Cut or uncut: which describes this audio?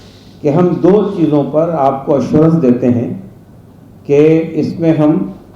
uncut